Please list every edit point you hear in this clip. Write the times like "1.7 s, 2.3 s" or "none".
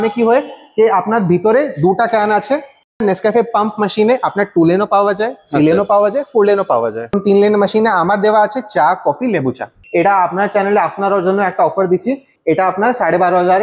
3.0 s, 7.2 s, 9.7 s, 12.3 s